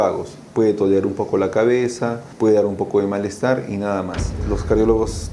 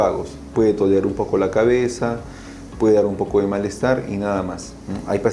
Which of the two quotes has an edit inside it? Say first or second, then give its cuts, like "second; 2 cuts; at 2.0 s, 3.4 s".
first; 2 cuts; at 2.2 s, 4.4 s